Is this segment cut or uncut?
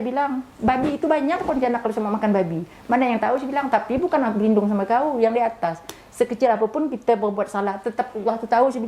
uncut